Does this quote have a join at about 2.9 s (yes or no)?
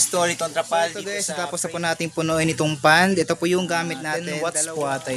no